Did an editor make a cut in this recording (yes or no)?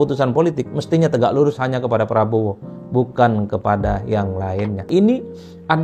yes